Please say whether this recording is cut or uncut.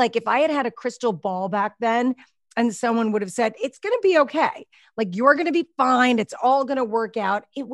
uncut